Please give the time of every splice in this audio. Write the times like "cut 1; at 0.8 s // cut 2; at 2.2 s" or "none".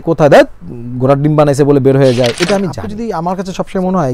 cut 1; at 2.9 s